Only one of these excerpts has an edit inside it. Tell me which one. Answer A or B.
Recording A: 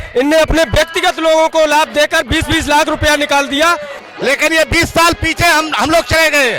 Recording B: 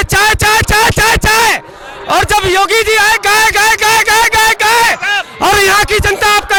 A